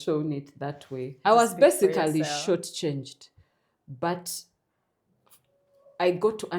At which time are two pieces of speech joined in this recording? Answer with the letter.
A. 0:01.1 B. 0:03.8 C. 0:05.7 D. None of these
A